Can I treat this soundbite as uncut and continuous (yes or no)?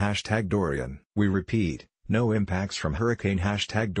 no